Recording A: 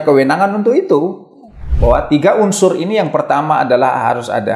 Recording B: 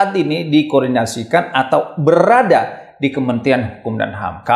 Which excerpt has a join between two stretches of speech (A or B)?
A